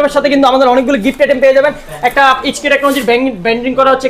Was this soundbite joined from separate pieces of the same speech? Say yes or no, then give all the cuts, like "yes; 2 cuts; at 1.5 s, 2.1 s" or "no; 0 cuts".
no; 0 cuts